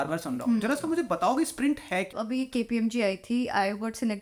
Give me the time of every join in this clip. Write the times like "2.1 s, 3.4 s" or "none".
2.1 s